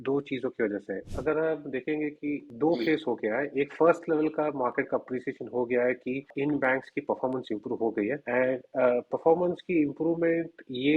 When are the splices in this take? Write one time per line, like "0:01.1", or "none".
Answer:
0:01.0
0:02.5
0:06.3
0:08.2